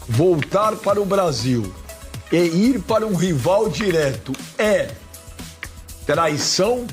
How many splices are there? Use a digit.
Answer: 0